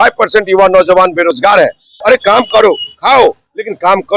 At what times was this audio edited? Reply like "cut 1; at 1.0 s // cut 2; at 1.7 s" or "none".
cut 1; at 2.0 s